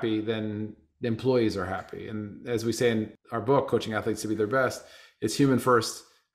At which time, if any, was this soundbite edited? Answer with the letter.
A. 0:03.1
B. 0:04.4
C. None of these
A